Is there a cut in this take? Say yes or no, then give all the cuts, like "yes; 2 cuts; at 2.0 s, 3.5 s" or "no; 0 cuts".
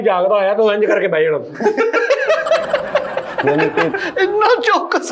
no; 0 cuts